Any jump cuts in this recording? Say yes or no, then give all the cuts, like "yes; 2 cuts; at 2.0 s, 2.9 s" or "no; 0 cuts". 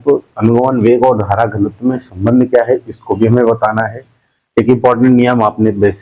no; 0 cuts